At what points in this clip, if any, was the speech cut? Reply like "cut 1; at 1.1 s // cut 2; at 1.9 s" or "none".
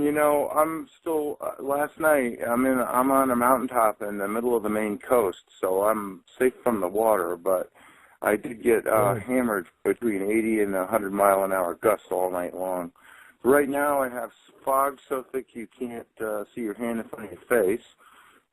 cut 1; at 2.8 s